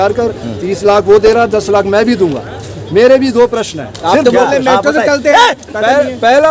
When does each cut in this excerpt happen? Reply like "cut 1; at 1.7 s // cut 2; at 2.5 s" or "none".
none